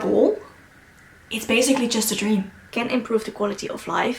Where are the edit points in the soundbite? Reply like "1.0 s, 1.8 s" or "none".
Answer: 2.6 s

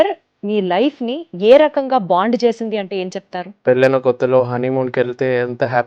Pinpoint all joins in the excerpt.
3.5 s

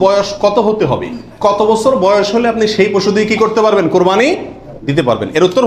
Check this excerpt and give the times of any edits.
none

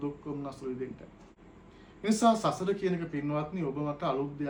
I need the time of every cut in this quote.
none

